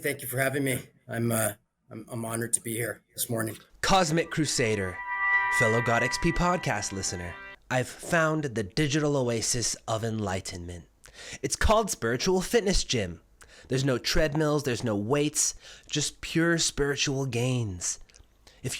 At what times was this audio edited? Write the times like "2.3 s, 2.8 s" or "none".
3.7 s